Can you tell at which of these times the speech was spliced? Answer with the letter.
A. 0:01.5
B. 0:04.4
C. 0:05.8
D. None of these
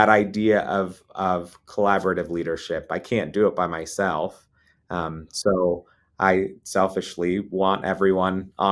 D